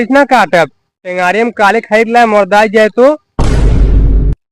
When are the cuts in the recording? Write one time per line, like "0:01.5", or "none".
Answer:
0:03.4